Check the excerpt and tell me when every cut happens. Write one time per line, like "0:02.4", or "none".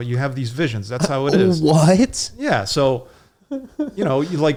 none